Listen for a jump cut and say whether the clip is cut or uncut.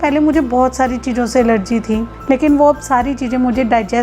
cut